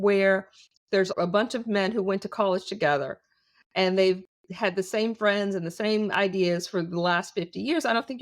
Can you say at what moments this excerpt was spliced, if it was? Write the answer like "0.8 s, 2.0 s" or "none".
1.1 s